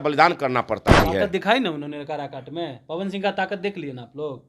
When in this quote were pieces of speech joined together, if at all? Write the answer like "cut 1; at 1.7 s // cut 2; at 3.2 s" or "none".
cut 1; at 1.0 s